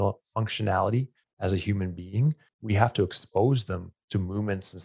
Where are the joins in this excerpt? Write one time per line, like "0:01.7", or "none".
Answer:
0:01.2
0:02.5
0:03.9